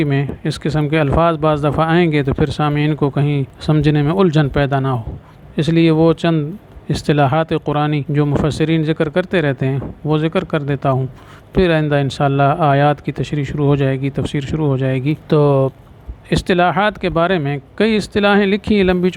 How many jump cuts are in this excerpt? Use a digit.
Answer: 3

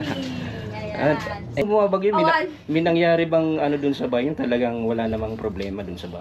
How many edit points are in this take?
1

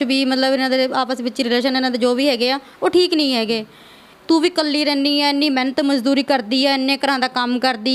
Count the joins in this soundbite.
1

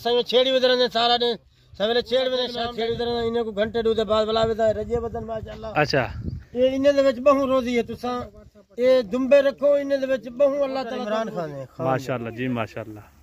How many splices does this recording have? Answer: 2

